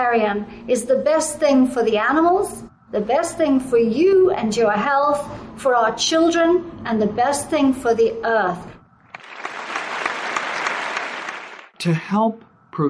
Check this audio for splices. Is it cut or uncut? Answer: cut